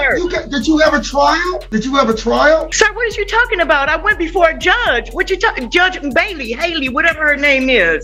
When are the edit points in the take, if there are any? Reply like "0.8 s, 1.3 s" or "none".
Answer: none